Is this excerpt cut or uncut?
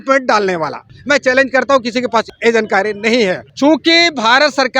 cut